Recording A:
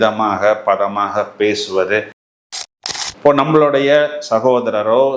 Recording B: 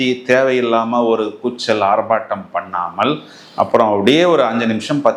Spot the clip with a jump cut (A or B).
A